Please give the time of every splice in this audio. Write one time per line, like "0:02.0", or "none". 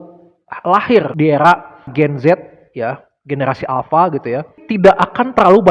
0:04.6